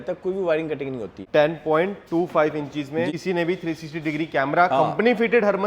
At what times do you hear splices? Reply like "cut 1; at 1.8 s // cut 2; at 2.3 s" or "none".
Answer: cut 1; at 1.1 s // cut 2; at 3.1 s

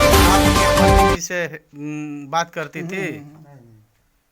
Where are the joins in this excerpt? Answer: cut 1; at 1.2 s

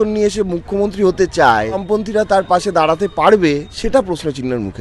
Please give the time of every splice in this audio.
cut 1; at 1.8 s // cut 2; at 3.7 s

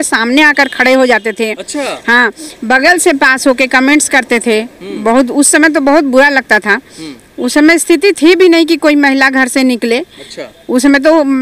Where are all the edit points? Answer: none

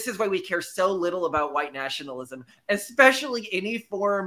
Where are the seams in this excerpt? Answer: none

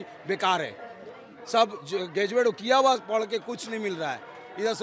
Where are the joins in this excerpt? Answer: none

